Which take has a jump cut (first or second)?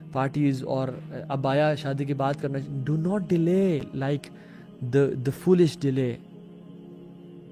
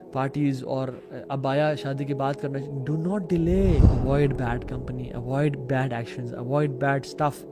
second